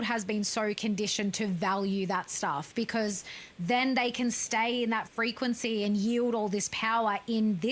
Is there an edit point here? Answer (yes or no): no